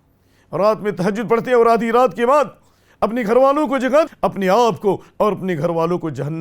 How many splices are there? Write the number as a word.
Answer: one